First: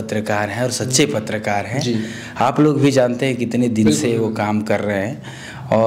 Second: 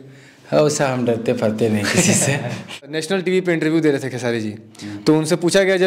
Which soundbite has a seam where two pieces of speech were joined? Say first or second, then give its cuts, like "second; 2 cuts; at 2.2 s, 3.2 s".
second; 1 cut; at 2.9 s